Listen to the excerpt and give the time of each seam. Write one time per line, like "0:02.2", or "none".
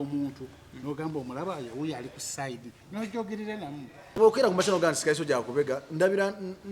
0:04.2